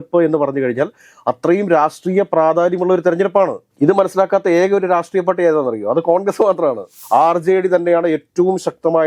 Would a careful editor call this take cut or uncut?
cut